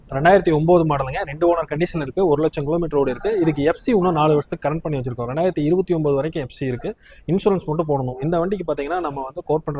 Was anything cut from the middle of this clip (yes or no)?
no